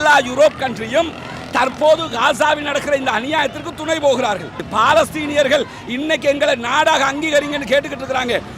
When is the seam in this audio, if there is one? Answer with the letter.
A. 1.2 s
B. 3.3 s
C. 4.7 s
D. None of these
C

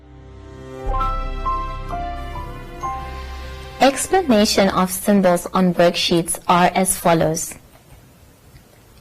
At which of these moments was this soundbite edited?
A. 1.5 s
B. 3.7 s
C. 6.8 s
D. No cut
B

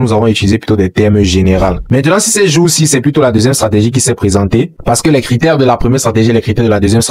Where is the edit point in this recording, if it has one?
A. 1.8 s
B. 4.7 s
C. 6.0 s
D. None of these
A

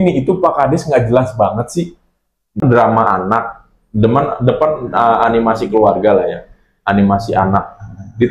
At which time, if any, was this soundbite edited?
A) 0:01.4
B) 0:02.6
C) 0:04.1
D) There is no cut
B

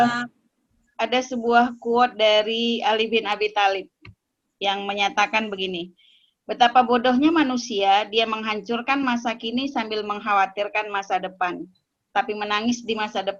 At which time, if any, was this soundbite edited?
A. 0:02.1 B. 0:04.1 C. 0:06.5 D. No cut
D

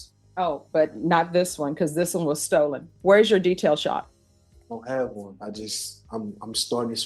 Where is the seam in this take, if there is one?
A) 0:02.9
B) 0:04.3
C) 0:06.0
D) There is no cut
A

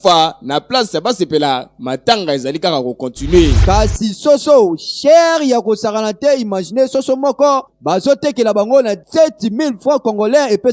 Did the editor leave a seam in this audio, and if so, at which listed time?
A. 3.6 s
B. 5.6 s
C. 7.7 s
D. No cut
A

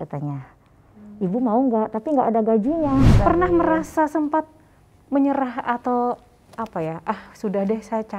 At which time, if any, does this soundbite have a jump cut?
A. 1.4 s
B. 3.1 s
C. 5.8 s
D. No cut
B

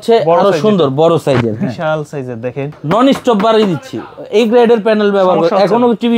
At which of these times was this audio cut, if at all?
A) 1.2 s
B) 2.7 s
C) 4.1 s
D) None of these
B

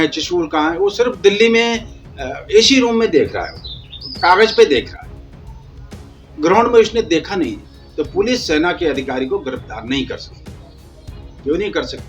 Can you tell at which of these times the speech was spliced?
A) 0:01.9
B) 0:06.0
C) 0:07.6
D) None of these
C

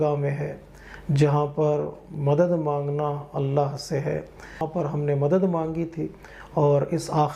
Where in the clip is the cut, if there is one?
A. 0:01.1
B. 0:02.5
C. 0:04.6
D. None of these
C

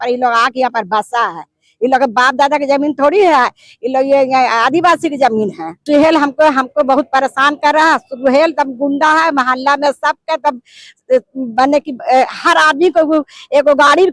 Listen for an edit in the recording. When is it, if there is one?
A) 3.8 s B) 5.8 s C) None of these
B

